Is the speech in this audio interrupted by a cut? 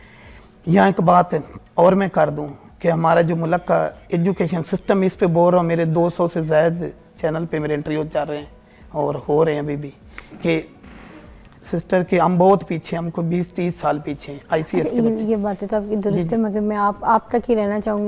no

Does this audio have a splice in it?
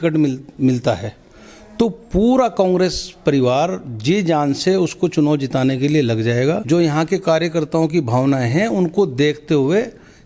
yes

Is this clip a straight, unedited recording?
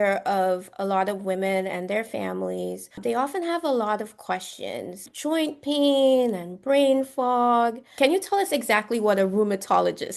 no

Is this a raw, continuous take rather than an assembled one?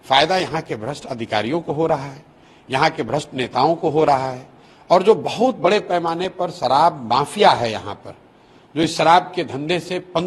yes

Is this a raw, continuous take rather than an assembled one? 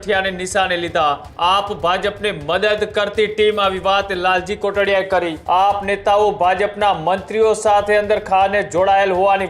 no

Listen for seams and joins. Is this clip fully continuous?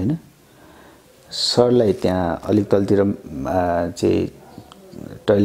yes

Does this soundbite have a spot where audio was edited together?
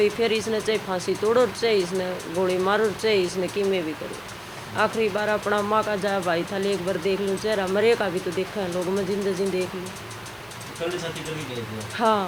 no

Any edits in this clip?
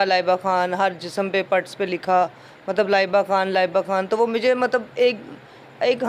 no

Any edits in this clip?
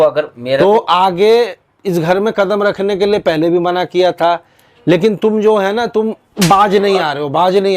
no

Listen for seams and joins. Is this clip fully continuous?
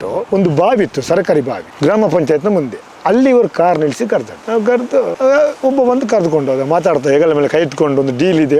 yes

